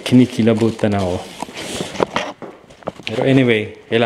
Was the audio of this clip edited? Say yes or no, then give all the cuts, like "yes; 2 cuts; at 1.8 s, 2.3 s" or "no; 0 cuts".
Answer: no; 0 cuts